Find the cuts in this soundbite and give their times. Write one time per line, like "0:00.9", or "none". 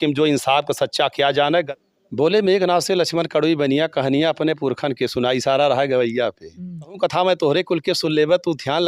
0:01.7
0:07.0